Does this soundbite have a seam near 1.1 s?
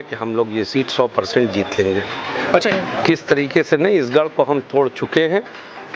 no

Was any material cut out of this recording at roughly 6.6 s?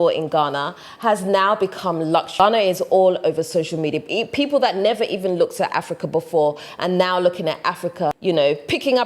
no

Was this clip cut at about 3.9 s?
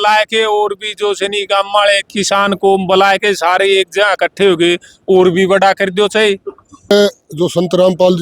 no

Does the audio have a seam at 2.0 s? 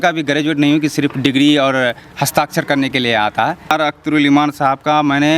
no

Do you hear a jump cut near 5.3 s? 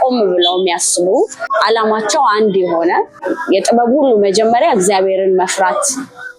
no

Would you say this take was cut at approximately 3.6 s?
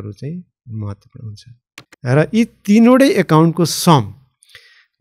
no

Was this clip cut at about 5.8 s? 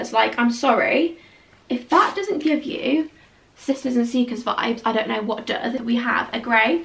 yes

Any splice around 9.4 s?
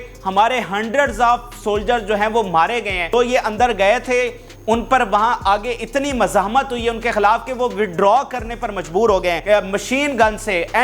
yes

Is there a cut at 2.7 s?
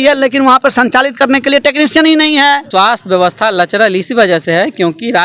yes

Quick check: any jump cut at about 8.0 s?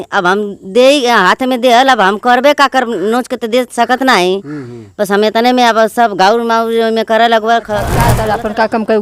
yes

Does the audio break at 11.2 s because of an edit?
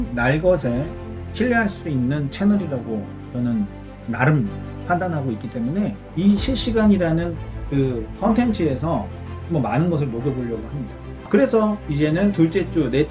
yes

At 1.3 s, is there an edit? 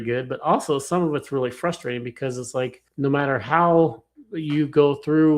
no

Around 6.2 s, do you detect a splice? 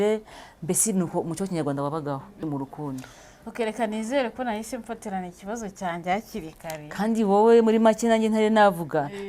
no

